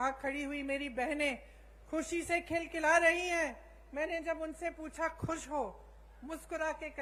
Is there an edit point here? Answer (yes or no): no